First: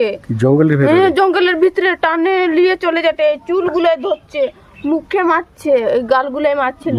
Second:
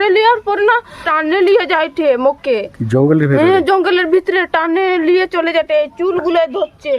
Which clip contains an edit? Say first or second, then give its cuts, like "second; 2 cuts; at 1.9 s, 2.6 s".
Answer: second; 1 cut; at 1.0 s